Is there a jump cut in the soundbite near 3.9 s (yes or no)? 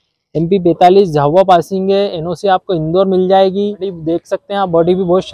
yes